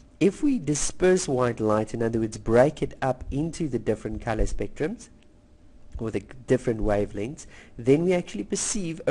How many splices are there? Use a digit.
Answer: 1